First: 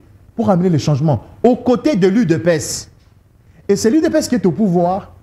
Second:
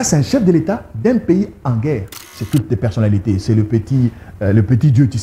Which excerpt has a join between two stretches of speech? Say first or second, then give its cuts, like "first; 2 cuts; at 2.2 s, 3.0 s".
second; 1 cut; at 2.4 s